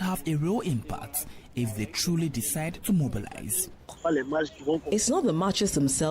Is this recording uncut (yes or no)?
no